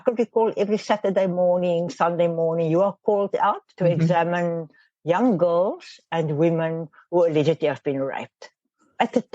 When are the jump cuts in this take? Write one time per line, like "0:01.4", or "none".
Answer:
0:03.7